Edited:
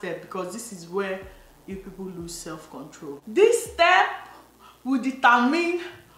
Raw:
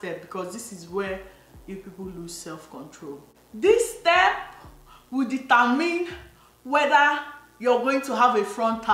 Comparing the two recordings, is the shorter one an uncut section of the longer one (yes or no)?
no